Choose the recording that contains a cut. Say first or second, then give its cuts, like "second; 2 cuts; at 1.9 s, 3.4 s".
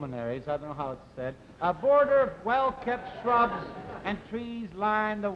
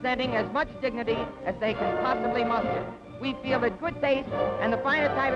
second; 1 cut; at 2.5 s